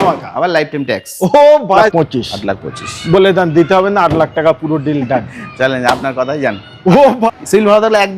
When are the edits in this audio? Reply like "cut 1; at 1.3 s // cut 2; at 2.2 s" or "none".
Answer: cut 1; at 1.9 s // cut 2; at 7.3 s